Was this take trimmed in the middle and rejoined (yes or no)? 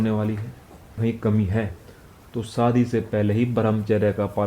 yes